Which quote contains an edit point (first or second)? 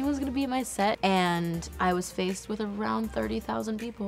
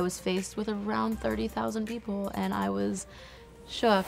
first